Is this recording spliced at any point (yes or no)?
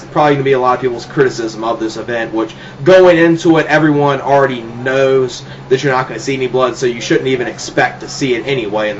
yes